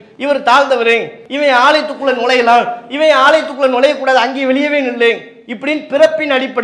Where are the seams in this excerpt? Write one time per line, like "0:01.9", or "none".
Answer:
0:01.2